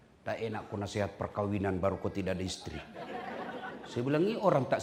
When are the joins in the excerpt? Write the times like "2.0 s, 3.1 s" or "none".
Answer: none